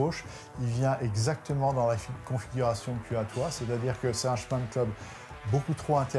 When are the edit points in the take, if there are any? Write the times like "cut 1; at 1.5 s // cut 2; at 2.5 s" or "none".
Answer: none